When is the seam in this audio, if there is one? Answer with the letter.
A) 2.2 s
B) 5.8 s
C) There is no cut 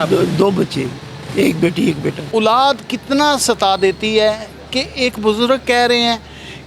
A